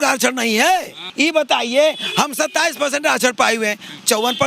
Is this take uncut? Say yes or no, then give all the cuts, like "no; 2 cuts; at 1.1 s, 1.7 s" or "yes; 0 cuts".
no; 1 cut; at 1.1 s